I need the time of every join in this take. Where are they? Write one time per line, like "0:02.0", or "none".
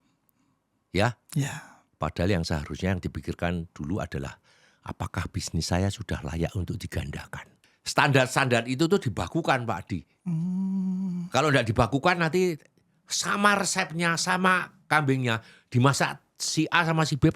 0:07.6

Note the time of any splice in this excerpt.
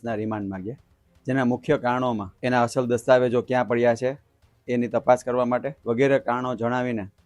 0:02.3
0:05.7

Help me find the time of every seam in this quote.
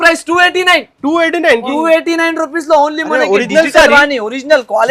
none

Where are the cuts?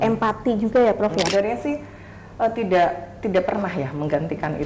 0:01.3

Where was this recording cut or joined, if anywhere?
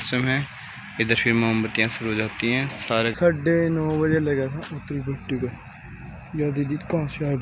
0:03.1

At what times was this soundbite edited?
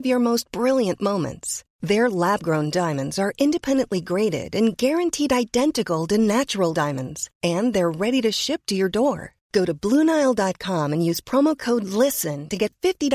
none

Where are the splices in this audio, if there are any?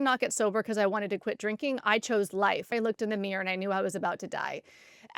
0:02.7

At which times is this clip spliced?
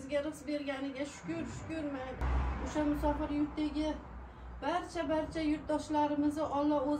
0:02.4

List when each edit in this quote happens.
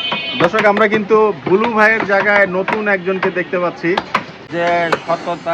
0:04.4

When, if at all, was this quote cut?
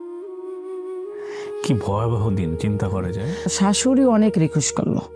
0:03.2

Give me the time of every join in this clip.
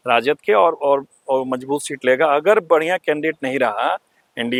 none

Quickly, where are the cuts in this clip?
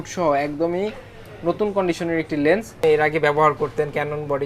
0:02.8

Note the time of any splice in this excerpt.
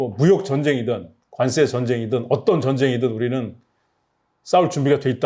none

